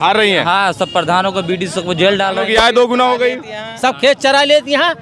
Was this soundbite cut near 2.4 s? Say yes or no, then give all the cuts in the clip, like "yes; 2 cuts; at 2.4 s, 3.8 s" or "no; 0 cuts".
yes; 1 cut; at 2.4 s